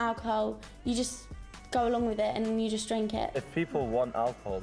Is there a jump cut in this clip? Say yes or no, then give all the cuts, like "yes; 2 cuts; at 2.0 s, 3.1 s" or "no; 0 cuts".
yes; 1 cut; at 3.4 s